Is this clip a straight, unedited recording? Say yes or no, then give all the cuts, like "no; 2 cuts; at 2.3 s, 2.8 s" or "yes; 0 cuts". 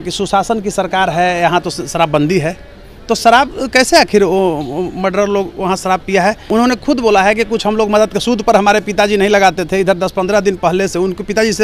no; 1 cut; at 6.4 s